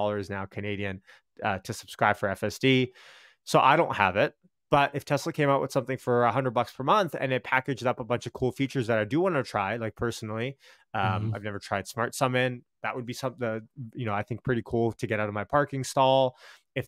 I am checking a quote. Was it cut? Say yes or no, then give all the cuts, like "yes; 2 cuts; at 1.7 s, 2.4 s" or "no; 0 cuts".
no; 0 cuts